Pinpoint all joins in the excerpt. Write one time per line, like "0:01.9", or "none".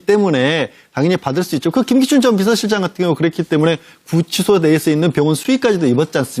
0:03.7